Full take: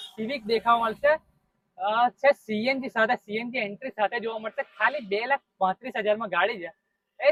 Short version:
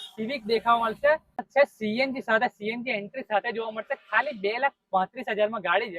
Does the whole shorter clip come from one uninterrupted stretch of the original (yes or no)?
no